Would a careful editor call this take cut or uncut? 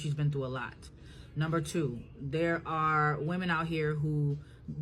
cut